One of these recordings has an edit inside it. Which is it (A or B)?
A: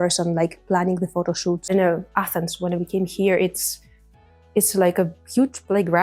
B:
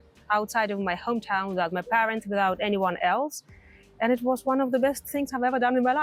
A